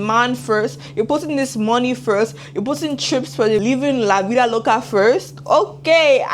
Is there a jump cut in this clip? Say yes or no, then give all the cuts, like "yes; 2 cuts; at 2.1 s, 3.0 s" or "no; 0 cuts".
yes; 1 cut; at 3.6 s